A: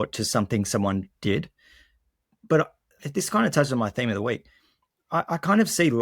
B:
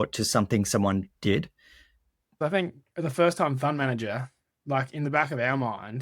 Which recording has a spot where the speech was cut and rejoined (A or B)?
B